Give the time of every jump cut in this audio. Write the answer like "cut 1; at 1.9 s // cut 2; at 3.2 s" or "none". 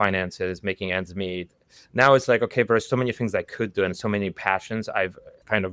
none